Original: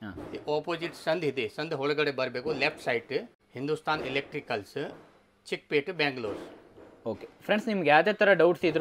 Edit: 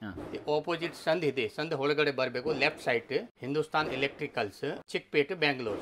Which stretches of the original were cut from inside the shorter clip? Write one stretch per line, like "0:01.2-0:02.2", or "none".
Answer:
0:03.3-0:03.5
0:05.0-0:05.4